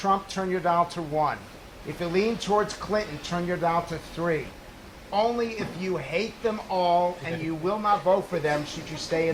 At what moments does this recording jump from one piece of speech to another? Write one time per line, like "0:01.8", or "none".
none